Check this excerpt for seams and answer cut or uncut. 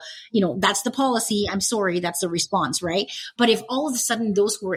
uncut